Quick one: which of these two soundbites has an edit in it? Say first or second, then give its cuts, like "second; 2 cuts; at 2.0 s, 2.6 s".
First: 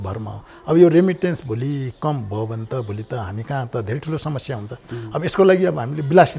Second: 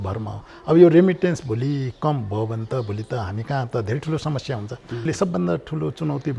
second; 1 cut; at 5.1 s